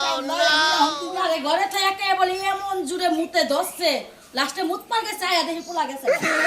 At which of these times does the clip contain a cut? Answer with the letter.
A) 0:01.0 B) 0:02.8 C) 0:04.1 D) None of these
A